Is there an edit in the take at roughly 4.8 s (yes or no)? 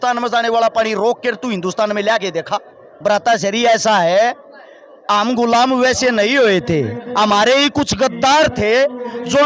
no